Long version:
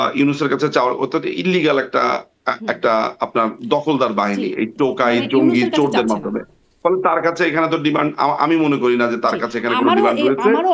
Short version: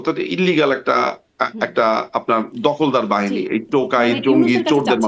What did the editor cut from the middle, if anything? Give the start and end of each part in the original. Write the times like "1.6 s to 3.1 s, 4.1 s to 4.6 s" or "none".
none